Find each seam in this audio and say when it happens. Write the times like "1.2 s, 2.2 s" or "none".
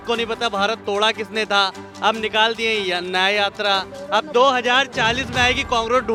none